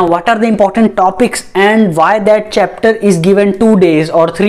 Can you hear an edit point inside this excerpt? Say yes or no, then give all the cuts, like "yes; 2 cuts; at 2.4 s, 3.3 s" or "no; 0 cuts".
no; 0 cuts